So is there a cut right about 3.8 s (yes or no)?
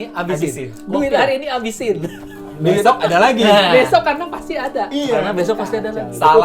no